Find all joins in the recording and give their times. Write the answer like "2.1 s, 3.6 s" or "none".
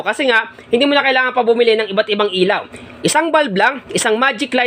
none